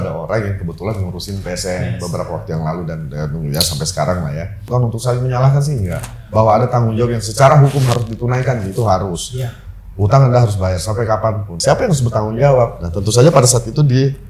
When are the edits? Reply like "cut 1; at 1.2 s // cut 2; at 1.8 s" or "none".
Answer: cut 1; at 4.7 s // cut 2; at 11.5 s